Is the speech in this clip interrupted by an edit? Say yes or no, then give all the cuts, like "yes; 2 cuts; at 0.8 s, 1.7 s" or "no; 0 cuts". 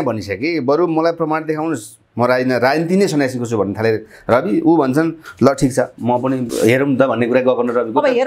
no; 0 cuts